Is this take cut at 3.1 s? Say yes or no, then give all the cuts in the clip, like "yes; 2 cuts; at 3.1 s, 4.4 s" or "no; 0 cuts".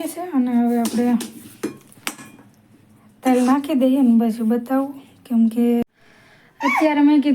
no; 1 cut; at 5.8 s